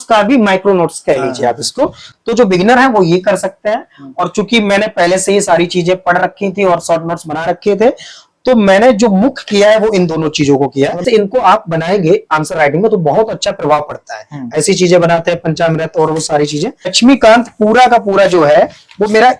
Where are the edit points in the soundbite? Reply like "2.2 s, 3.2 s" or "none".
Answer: 2.1 s, 11.0 s, 16.9 s